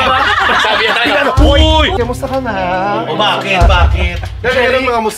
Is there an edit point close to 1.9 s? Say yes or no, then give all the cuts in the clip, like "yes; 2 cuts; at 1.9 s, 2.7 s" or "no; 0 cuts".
yes; 1 cut; at 1.9 s